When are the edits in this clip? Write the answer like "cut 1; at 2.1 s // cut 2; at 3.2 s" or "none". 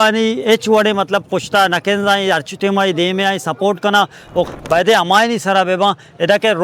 cut 1; at 4.5 s